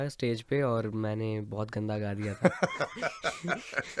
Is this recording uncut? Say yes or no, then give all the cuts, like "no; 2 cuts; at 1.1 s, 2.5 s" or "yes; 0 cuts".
yes; 0 cuts